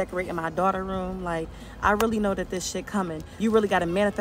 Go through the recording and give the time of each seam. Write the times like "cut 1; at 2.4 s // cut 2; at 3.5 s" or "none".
cut 1; at 3.2 s